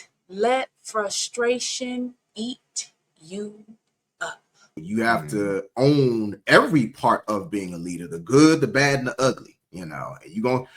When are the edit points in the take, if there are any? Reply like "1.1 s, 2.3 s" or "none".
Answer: 4.8 s